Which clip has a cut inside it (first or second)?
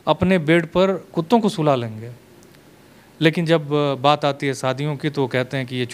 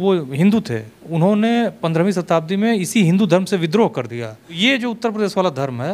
second